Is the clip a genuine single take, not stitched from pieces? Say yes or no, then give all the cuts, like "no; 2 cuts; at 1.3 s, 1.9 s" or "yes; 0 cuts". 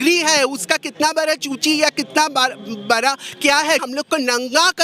no; 1 cut; at 3.8 s